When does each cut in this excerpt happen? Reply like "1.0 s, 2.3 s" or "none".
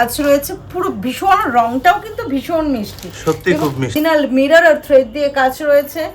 3.9 s